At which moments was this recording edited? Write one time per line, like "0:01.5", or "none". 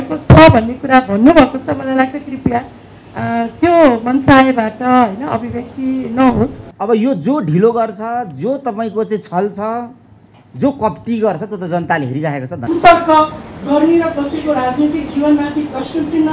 0:06.7
0:12.5